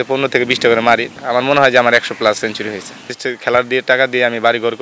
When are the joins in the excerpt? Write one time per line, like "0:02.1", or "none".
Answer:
0:01.1
0:03.1